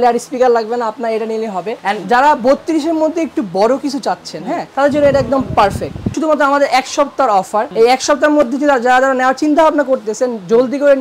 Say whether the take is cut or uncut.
cut